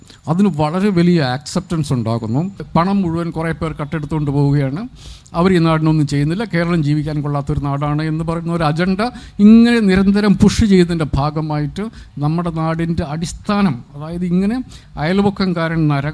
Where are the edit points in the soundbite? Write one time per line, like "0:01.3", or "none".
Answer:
0:02.6